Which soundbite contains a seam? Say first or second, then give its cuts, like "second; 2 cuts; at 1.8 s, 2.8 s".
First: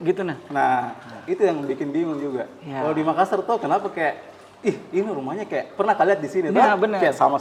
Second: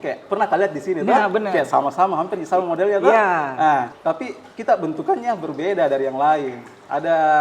second; 1 cut; at 3.9 s